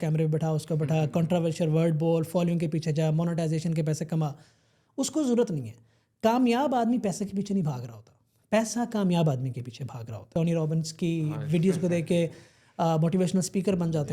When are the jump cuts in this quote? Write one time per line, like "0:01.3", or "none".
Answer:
0:10.3